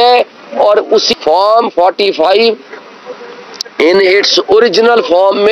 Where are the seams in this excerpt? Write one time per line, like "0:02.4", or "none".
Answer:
0:01.1